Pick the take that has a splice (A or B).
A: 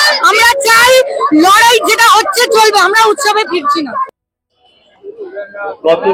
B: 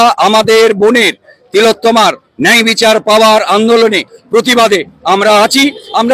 A